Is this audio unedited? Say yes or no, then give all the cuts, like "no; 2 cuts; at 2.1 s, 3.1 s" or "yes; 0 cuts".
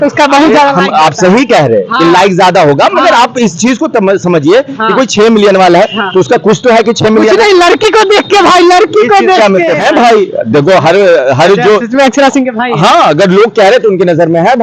no; 1 cut; at 9.8 s